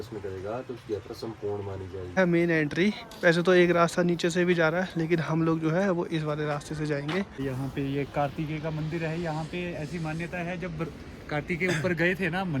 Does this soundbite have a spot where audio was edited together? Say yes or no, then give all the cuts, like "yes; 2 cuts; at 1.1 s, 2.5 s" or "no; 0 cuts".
yes; 2 cuts; at 2.2 s, 7.4 s